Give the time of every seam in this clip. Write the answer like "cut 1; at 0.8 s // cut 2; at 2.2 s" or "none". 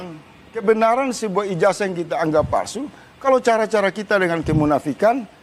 none